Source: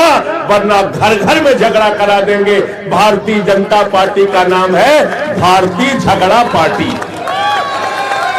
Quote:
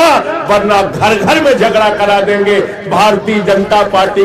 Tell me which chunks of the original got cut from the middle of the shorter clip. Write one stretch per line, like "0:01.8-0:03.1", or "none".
none